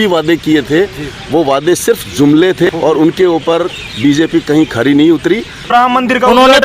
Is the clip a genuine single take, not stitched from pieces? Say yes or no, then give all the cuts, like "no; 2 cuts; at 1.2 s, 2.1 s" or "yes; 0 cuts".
no; 2 cuts; at 2.7 s, 5.7 s